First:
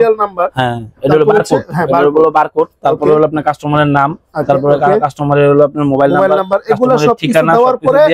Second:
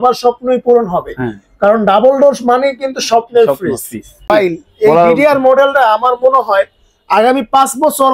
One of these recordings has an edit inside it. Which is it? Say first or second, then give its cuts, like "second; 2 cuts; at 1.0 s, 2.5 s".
second; 1 cut; at 4.3 s